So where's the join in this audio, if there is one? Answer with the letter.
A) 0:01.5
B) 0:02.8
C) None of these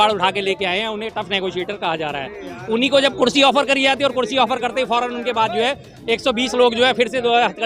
C